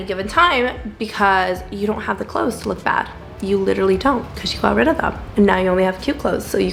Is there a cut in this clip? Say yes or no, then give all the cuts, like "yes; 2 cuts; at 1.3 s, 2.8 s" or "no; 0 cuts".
no; 0 cuts